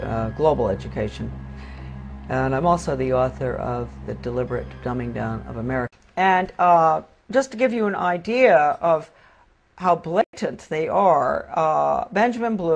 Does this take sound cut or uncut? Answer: cut